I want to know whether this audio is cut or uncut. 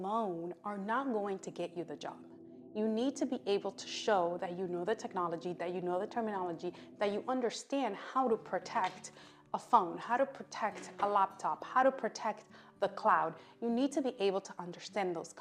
uncut